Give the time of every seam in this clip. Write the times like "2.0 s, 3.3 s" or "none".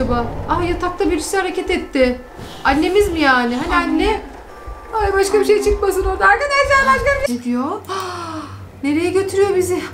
7.3 s